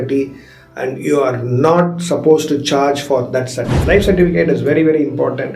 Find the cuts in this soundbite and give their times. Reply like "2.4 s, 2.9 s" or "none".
3.8 s